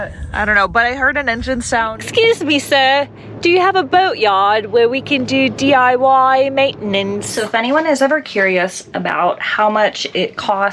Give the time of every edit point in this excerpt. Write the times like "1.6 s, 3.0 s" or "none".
2.0 s, 7.3 s